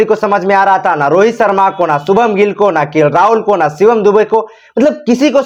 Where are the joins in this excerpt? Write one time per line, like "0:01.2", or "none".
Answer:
none

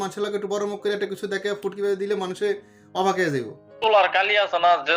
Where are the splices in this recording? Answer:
0:03.8

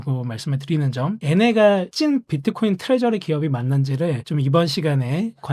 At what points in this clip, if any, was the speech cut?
0:01.2
0:04.2

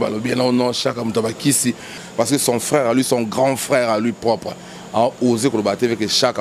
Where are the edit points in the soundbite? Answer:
0:02.0

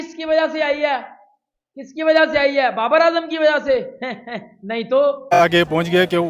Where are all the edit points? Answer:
0:05.4

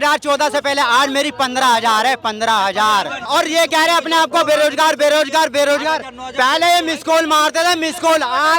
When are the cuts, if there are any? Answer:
0:03.3

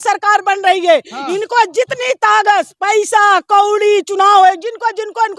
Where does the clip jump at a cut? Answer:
none

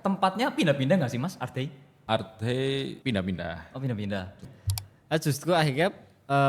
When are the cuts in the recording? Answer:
0:01.9
0:03.0
0:04.4

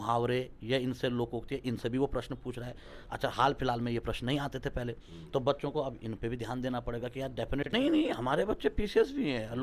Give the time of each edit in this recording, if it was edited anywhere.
0:07.7

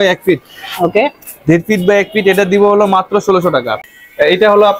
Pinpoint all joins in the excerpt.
0:03.8

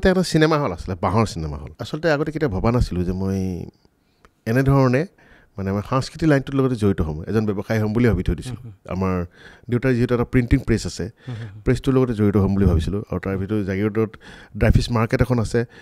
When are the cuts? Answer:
0:01.7

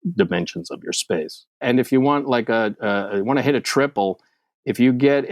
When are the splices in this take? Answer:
0:01.6

